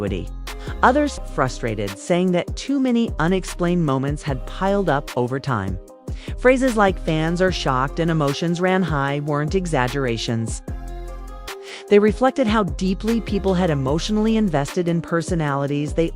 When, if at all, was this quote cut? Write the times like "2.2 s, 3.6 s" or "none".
1.2 s